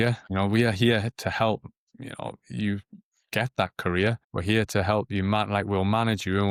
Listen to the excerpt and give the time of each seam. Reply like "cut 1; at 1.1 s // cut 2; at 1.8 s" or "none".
none